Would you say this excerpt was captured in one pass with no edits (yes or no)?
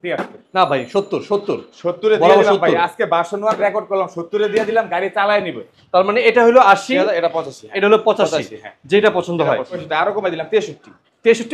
no